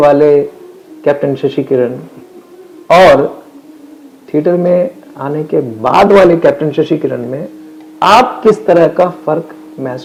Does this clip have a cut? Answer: no; 0 cuts

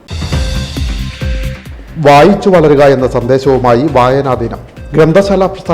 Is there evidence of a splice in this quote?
yes; 1 cut; at 1.3 s

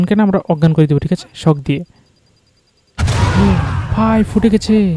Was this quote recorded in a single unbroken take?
yes; 0 cuts

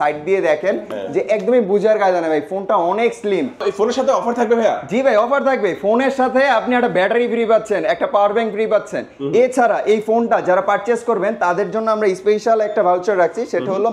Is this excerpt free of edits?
no; 1 cut; at 3.6 s

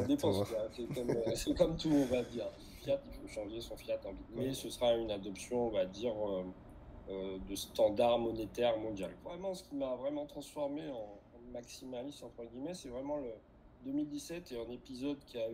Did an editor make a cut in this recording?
yes; 3 cuts; at 2.7 s, 4.3 s, 9.3 s

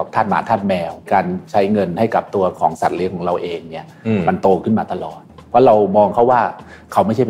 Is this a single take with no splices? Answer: no; 2 cuts; at 1.1 s, 5.3 s

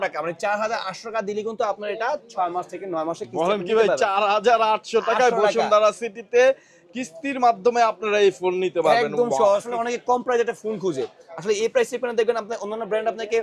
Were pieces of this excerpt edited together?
yes; 1 cut; at 9.7 s

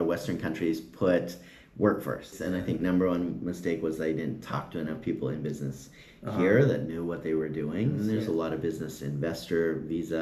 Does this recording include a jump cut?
yes; 2 cuts; at 2.4 s, 8.0 s

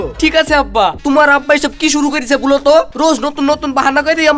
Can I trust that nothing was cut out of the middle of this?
no; 1 cut; at 0.9 s

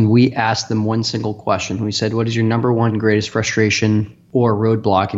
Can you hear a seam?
yes; 1 cut; at 4.2 s

